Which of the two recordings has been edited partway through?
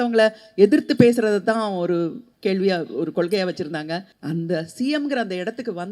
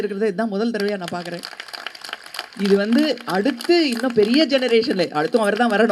first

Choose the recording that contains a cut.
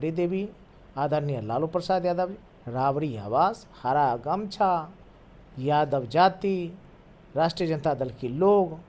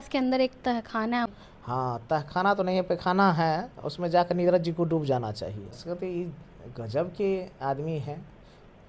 second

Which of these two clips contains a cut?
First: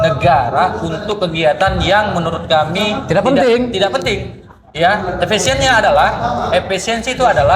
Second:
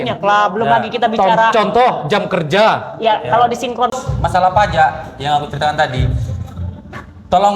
second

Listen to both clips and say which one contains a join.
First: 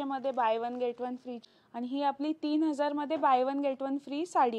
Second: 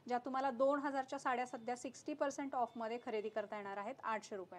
first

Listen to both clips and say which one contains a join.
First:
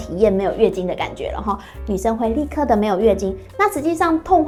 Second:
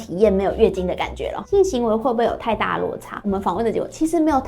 second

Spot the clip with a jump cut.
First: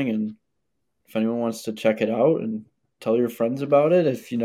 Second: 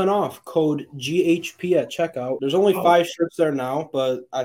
second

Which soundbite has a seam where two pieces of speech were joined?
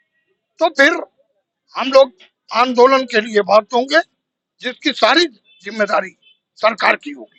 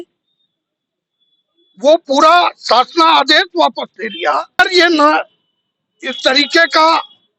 second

